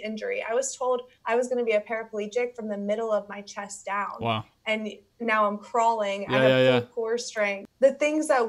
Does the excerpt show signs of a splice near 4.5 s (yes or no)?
no